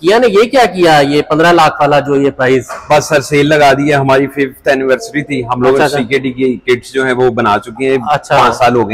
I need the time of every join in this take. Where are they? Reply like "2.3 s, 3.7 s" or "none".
none